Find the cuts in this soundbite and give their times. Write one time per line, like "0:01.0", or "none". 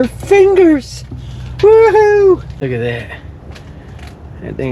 0:02.6